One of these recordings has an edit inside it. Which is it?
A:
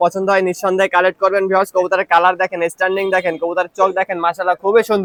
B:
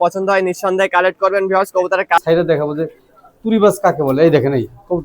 B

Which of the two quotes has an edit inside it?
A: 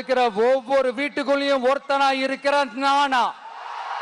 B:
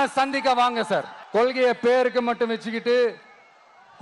B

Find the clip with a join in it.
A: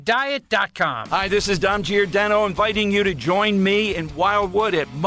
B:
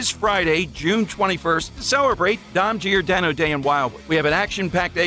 A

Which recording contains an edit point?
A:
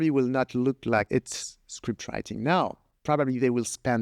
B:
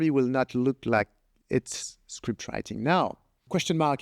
A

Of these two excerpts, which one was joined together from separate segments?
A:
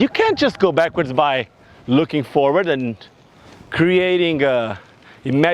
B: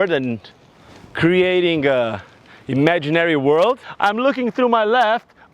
B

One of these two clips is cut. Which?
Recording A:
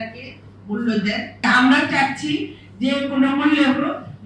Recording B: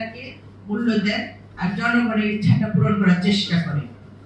A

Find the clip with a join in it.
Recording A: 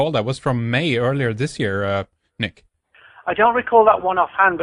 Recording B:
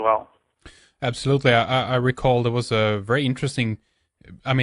B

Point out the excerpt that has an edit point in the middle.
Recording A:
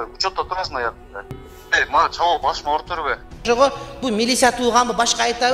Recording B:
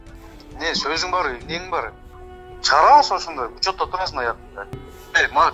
A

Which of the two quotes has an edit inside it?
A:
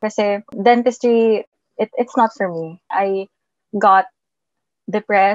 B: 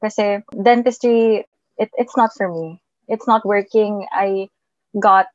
A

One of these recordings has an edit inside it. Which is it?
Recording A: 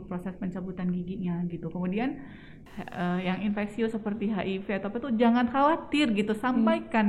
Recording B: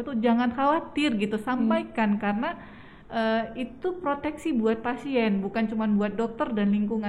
A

